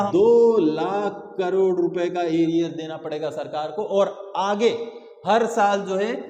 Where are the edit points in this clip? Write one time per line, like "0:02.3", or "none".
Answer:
none